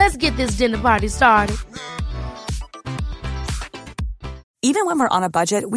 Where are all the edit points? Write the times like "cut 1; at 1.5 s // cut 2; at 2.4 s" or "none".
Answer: none